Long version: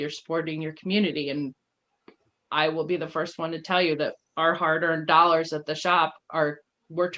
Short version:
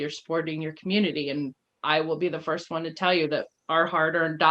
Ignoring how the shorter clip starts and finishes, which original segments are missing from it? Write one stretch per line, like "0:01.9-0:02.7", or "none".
0:01.7-0:02.3